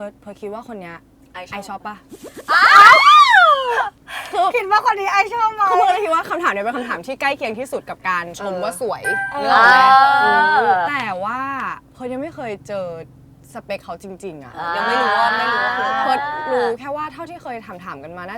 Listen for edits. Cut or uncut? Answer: uncut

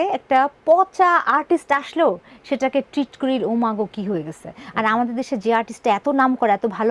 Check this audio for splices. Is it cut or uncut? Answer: uncut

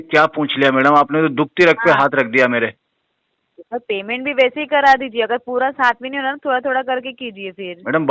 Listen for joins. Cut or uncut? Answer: uncut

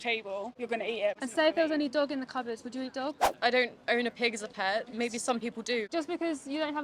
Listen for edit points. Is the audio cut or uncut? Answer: cut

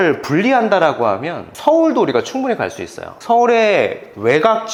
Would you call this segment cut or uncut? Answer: uncut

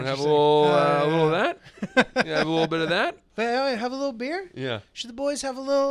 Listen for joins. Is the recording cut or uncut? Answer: cut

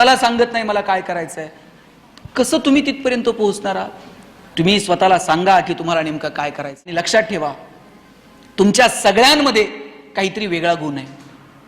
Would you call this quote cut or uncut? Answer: cut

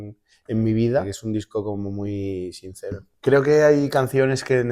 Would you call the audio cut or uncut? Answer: cut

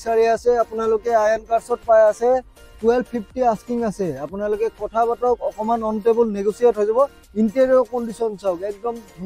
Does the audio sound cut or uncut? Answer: uncut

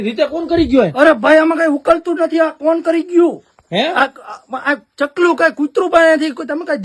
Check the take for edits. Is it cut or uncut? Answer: uncut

